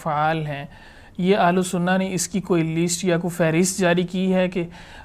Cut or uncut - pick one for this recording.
uncut